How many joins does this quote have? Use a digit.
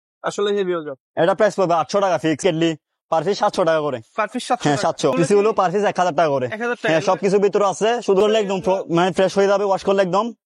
3